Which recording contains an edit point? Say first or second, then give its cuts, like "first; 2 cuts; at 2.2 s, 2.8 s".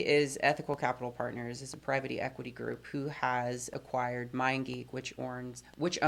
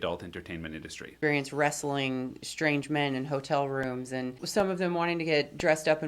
second; 2 cuts; at 1.1 s, 4.4 s